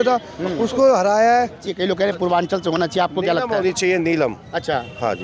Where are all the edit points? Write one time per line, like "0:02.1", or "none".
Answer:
0:01.7